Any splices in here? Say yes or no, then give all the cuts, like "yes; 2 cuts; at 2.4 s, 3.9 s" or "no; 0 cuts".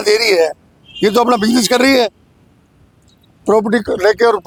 no; 0 cuts